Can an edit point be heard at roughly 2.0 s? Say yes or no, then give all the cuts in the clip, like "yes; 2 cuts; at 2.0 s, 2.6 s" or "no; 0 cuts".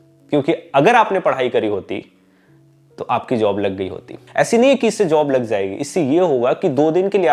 no; 1 cut; at 4.2 s